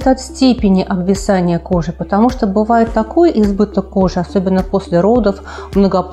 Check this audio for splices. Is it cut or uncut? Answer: uncut